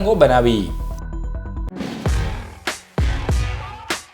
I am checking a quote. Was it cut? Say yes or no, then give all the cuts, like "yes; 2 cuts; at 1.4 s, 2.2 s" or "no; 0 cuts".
yes; 1 cut; at 1.5 s